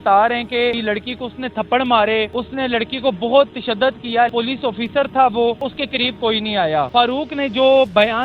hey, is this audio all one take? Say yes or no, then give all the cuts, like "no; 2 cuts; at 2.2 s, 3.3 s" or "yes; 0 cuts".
no; 5 cuts; at 0.8 s, 2.4 s, 4.3 s, 5.8 s, 6.9 s